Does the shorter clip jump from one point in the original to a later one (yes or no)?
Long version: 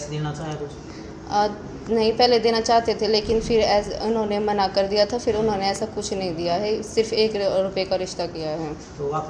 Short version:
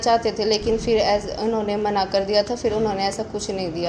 no